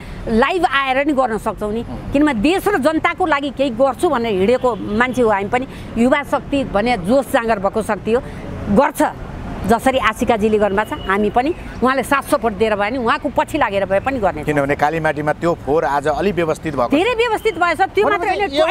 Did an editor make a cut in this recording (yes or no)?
no